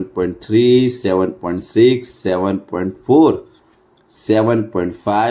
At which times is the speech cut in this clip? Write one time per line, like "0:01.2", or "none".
none

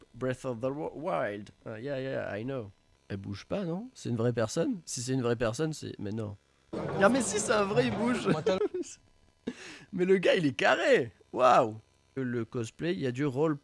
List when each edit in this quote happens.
0:02.8
0:06.7
0:12.2

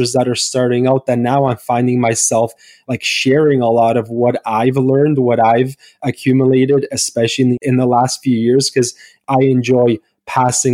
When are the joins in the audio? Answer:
0:07.6

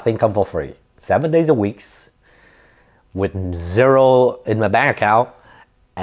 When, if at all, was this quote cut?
0:00.9

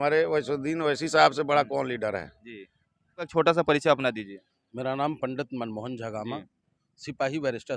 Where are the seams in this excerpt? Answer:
0:03.3

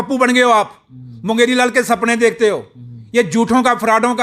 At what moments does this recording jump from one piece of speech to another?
none

